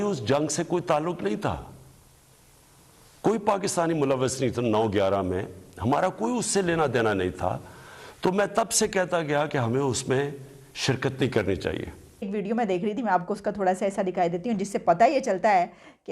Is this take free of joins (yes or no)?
no